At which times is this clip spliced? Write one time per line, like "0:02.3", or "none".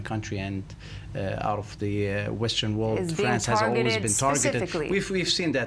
none